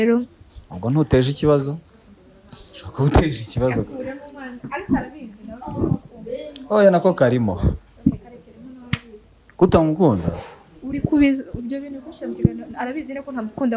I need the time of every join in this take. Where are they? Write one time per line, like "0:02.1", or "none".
none